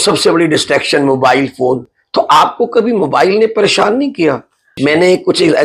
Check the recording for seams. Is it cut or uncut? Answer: cut